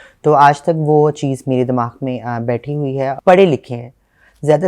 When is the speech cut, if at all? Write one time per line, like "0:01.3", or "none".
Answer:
0:03.2